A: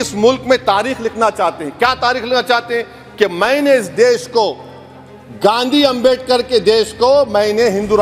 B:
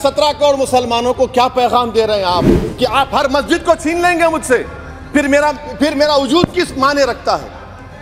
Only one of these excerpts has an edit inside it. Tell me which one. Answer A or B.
B